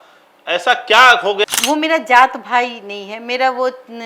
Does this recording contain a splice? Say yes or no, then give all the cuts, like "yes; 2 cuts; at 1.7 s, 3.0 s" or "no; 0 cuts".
yes; 1 cut; at 1.4 s